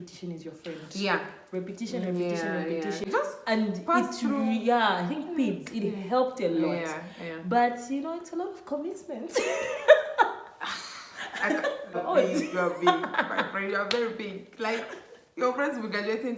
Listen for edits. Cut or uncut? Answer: cut